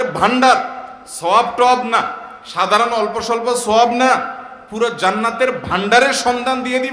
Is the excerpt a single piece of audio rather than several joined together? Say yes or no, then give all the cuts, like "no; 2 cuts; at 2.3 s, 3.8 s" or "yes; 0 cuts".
yes; 0 cuts